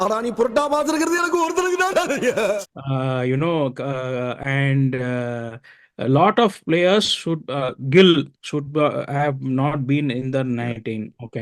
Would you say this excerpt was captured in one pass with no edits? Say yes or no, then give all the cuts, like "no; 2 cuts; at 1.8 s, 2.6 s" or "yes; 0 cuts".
yes; 0 cuts